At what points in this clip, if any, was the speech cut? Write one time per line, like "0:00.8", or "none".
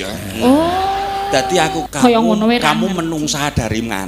0:01.8